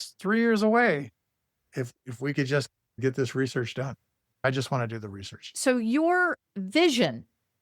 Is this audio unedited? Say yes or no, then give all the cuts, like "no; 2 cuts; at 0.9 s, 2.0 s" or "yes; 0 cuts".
no; 1 cut; at 5.5 s